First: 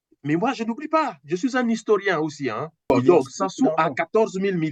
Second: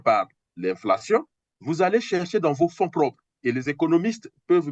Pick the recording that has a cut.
first; 1 cut; at 2.9 s

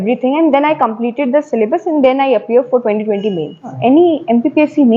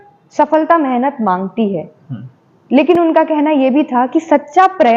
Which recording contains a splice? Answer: first; 1 cut; at 3.7 s

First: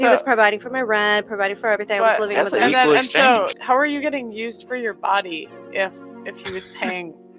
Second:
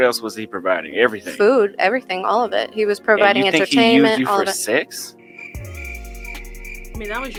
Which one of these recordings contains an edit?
first; 1 cut; at 3.6 s

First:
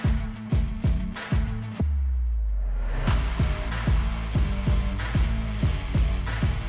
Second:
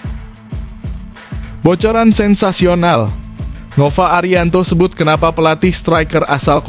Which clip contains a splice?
second; 1 cut; at 1.6 s

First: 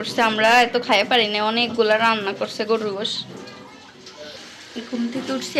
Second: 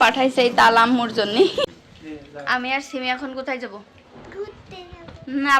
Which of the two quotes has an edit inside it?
second; 1 cut; at 1.7 s

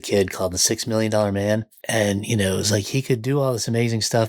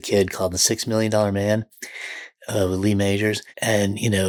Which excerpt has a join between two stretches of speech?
first; 1 cut; at 1.8 s

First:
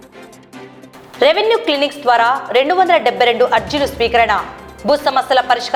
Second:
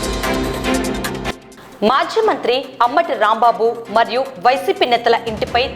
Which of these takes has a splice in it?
second; 1 cut; at 1.1 s

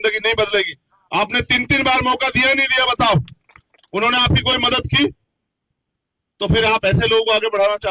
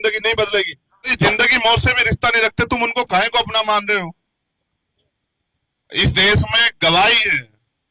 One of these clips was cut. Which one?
second; 1 cut; at 1.1 s

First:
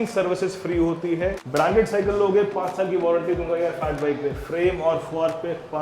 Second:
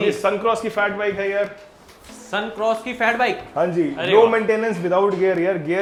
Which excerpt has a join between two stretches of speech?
first; 1 cut; at 1.4 s

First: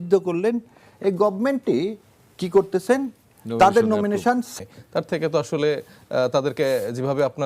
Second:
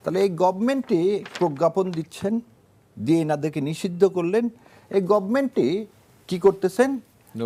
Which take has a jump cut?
first; 1 cut; at 4.5 s

